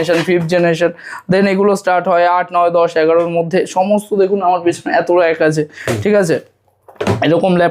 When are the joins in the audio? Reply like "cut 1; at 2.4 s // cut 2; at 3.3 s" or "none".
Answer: none